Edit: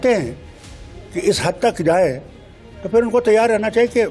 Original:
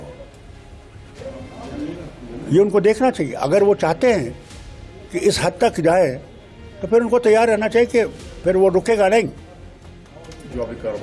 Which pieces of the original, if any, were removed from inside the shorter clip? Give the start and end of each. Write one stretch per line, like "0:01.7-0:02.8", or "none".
none